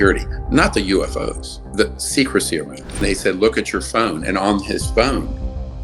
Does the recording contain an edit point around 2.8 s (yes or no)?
yes